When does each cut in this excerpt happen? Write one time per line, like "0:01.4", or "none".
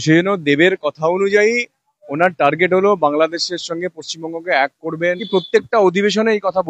0:05.1